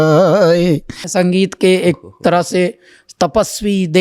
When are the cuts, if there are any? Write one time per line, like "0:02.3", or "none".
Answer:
0:01.0